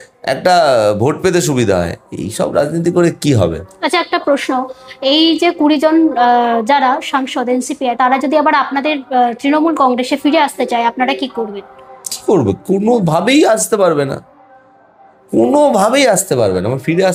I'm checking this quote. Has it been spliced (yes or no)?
no